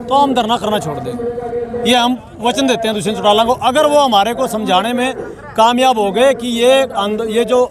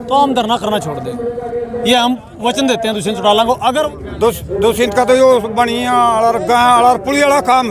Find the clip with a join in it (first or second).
second